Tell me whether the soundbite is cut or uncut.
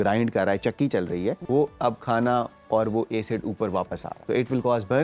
cut